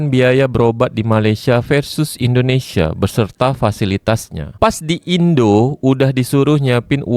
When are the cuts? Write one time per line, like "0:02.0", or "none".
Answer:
none